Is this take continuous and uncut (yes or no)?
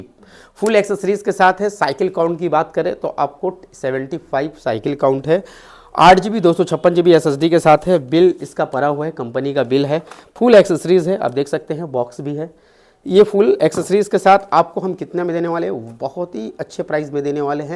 yes